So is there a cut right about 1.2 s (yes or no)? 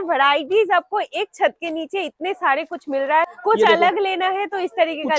no